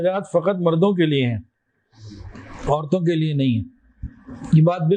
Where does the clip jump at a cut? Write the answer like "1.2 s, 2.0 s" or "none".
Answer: none